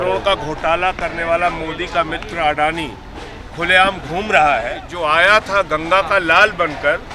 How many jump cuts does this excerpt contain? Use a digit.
1